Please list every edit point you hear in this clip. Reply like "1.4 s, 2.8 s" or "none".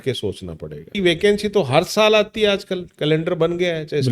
1.0 s